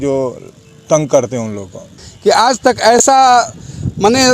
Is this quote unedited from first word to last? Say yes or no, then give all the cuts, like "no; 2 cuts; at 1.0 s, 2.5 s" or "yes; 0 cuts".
no; 1 cut; at 2.1 s